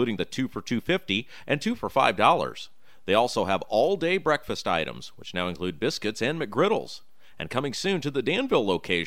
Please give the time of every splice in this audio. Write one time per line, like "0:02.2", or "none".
none